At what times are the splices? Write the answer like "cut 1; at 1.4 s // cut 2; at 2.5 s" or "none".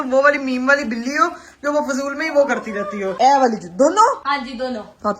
cut 1; at 3.1 s // cut 2; at 4.2 s